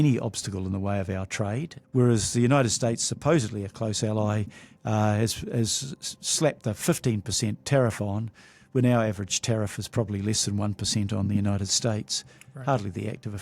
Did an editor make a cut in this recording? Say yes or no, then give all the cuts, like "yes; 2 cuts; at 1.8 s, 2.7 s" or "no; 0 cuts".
yes; 1 cut; at 1.8 s